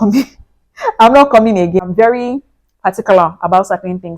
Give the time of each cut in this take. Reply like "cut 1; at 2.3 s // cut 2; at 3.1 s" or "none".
cut 1; at 1.8 s